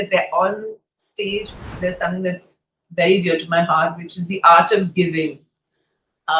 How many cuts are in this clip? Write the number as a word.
one